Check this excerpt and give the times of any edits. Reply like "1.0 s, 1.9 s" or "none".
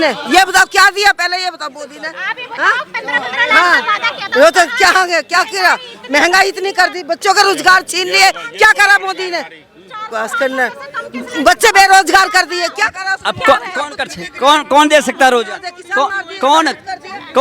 none